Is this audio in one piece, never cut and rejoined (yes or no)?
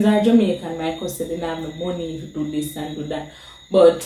yes